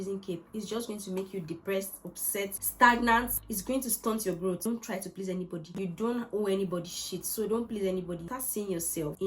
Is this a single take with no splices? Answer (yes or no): no